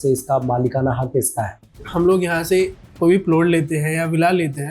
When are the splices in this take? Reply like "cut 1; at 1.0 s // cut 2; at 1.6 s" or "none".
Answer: cut 1; at 1.9 s

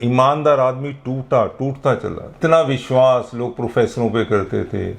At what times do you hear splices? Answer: cut 1; at 2.4 s

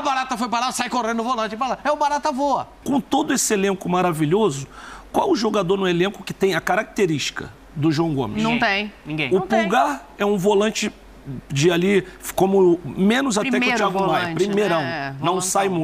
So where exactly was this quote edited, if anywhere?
cut 1; at 2.8 s

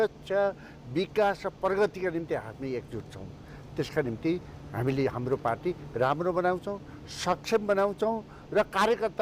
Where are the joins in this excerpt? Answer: none

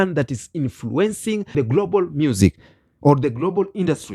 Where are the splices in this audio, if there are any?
cut 1; at 1.5 s

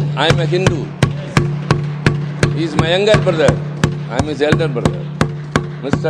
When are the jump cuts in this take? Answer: none

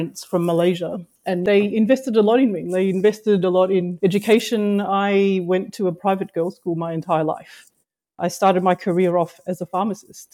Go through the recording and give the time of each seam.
cut 1; at 1.4 s // cut 2; at 3.9 s

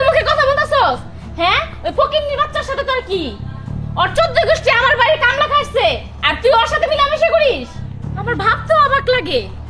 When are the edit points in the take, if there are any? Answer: none

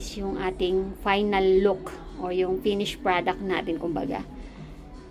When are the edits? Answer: none

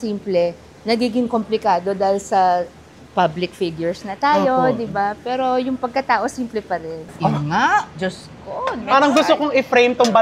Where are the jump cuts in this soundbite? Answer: cut 1; at 7.1 s // cut 2; at 8.8 s

